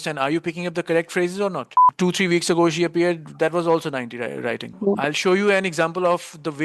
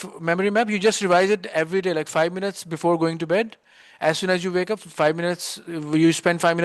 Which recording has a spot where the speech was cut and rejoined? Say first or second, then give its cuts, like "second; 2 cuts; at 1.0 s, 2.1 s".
first; 2 cuts; at 1.8 s, 4.7 s